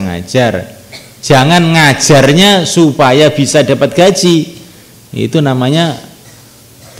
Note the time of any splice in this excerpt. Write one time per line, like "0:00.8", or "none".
none